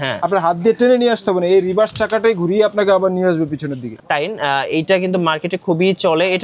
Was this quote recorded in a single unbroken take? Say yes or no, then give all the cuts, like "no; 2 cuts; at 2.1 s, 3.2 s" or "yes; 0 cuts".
no; 1 cut; at 3.9 s